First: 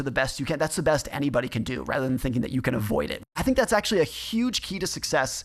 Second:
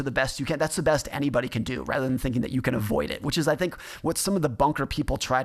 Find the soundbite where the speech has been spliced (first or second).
first